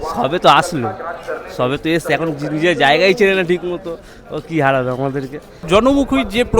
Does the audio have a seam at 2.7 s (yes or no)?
no